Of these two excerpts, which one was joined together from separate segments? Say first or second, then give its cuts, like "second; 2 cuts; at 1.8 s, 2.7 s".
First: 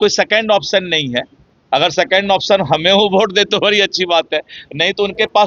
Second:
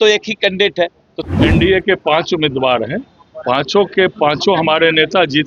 second; 1 cut; at 1.1 s